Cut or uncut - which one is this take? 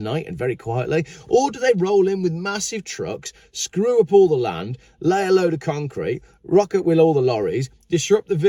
uncut